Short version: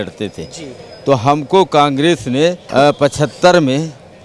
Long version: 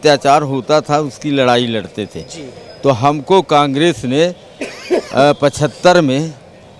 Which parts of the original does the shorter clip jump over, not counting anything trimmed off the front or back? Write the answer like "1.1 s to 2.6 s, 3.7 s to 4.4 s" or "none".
4.4 s to 5.1 s